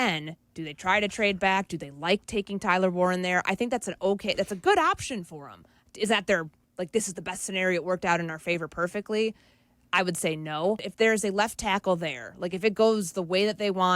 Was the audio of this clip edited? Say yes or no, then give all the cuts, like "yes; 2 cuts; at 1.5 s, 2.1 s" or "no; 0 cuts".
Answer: yes; 1 cut; at 10.9 s